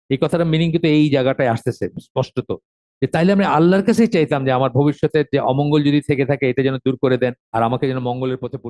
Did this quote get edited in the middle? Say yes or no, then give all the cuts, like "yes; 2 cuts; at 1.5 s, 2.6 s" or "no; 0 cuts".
yes; 1 cut; at 7.4 s